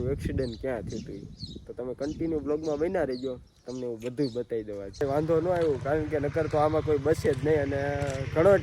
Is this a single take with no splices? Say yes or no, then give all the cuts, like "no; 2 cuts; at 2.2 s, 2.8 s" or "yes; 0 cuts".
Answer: no; 1 cut; at 5.0 s